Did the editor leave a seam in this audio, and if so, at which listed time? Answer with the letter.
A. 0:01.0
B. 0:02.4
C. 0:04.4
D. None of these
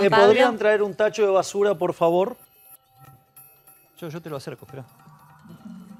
D